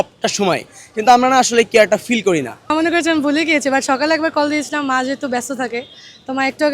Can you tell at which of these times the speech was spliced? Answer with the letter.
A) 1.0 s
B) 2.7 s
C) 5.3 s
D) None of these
B